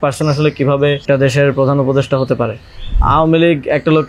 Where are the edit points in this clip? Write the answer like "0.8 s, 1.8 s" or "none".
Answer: 1.0 s, 3.0 s